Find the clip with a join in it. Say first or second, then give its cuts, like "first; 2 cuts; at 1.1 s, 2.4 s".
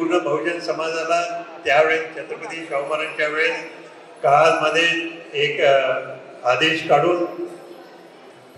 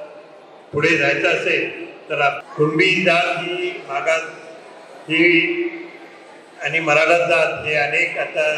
second; 1 cut; at 2.4 s